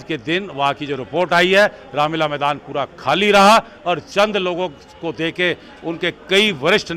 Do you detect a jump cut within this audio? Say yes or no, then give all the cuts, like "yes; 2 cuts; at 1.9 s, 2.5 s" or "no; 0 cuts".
no; 0 cuts